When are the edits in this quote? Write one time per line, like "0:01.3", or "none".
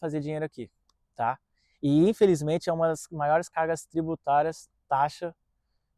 none